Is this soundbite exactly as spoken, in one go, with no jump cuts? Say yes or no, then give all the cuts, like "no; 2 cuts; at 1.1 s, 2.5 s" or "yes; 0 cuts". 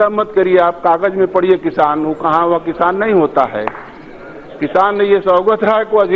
yes; 0 cuts